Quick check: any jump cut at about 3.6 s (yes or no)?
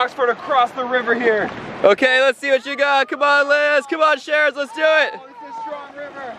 no